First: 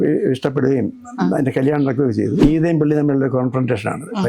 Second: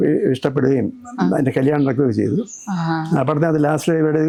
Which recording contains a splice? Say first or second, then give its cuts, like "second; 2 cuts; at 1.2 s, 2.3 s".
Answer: first; 1 cut; at 2.4 s